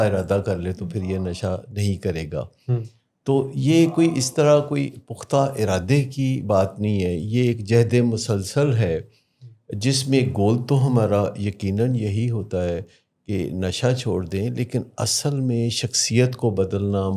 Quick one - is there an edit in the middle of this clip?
no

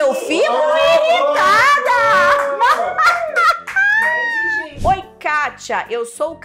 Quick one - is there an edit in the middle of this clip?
yes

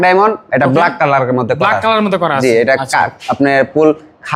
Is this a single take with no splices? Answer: yes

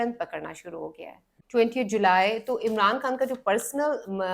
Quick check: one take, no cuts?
no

